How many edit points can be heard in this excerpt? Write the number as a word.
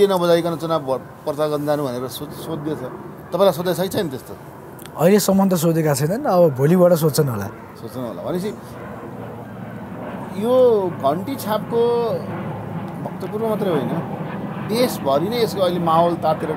zero